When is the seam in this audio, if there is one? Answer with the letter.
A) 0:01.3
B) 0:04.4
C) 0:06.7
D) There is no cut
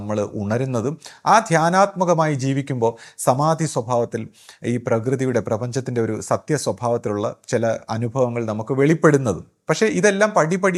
D